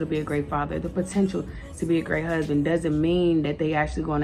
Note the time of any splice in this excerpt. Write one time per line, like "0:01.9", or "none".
none